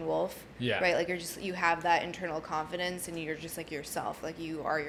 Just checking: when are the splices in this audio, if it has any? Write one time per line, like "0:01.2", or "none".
none